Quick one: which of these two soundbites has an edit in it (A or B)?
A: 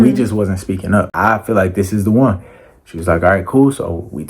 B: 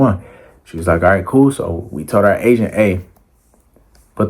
A